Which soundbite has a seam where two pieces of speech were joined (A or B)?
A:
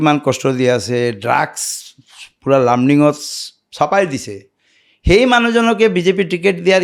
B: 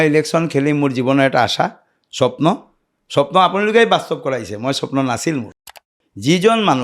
B